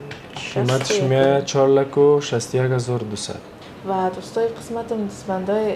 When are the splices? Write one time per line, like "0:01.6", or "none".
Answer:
0:03.6